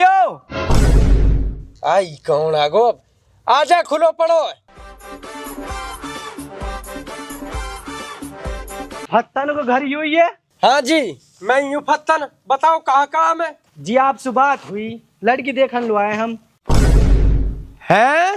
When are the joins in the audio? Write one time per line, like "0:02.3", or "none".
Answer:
none